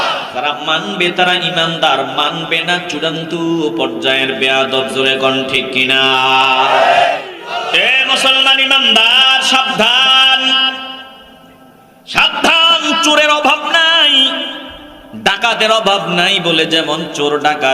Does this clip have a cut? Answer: yes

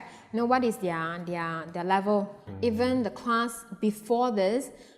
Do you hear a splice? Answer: yes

